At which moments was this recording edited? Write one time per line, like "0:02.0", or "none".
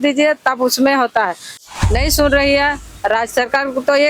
0:01.5